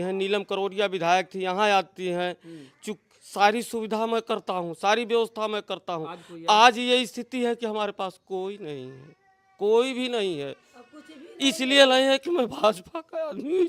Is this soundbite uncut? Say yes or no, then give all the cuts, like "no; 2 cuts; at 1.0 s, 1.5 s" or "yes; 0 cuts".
yes; 0 cuts